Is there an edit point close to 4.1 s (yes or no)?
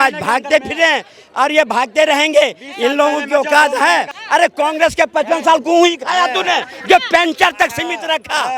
yes